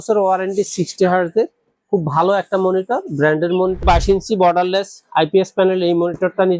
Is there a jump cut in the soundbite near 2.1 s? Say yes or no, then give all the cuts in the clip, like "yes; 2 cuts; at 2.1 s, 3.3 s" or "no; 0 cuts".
no; 1 cut; at 3.8 s